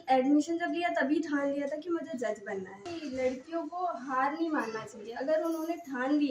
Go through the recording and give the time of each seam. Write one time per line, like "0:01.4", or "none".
0:02.9

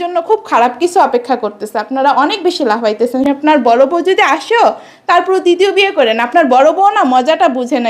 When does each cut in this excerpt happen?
0:03.2

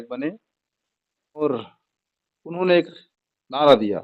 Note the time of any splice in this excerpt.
0:01.4

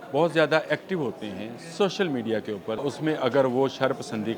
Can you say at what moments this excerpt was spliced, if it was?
0:02.8

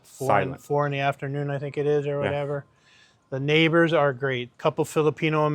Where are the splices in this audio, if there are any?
0:04.5

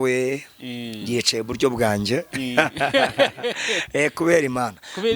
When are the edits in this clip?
none

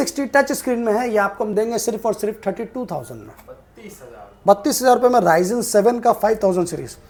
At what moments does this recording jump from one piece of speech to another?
none

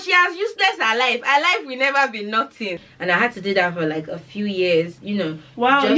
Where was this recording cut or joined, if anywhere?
0:02.9

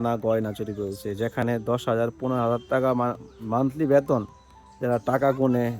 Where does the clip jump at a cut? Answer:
none

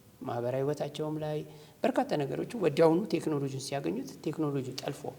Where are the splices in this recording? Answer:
none

